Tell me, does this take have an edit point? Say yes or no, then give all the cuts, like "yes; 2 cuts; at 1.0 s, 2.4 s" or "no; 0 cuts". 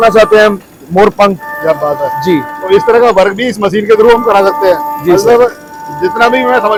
no; 0 cuts